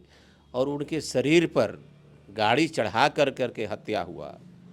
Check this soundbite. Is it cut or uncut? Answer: uncut